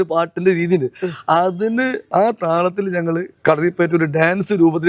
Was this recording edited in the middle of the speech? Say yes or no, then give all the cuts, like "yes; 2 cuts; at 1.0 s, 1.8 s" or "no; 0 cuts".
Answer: no; 0 cuts